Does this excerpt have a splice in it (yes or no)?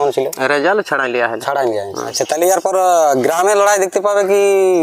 yes